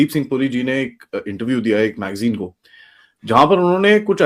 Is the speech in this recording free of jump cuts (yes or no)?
yes